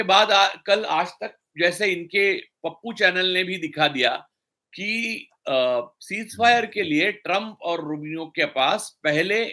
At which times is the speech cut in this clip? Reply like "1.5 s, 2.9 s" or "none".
none